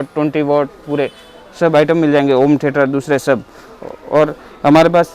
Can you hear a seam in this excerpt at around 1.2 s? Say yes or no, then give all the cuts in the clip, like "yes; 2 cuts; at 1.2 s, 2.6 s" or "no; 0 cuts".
no; 0 cuts